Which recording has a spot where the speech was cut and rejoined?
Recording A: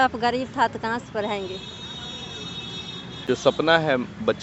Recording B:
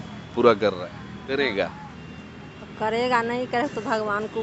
A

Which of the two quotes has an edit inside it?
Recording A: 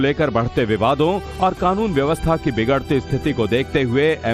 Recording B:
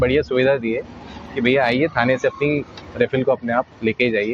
B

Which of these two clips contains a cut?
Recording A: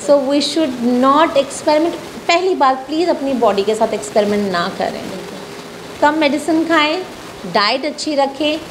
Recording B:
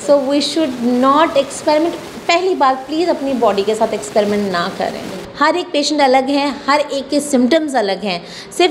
B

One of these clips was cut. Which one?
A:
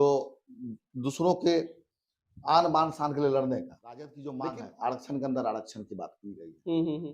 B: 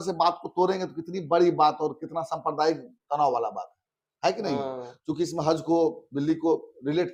A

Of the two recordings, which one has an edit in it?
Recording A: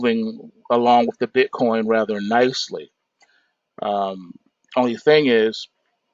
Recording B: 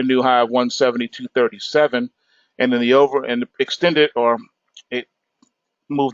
B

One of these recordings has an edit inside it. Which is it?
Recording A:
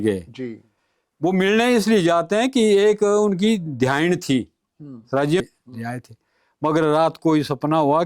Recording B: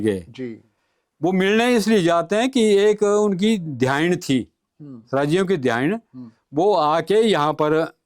A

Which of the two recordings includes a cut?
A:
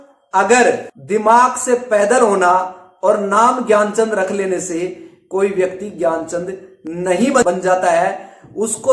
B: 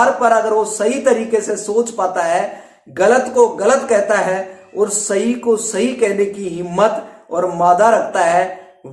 A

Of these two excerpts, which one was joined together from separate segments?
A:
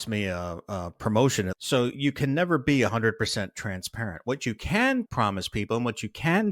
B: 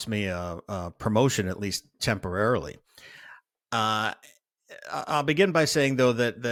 A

